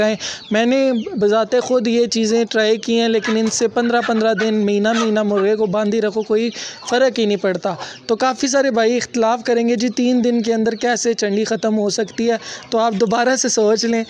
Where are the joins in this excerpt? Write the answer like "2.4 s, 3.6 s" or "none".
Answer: none